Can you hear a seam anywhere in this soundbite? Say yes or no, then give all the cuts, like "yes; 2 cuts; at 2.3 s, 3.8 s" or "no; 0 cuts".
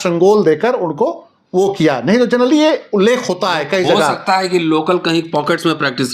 no; 0 cuts